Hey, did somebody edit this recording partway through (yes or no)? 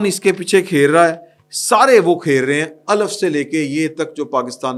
no